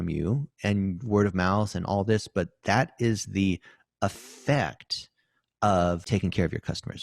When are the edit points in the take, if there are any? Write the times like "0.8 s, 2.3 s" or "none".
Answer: 6.0 s